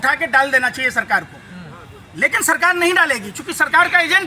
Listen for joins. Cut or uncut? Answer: uncut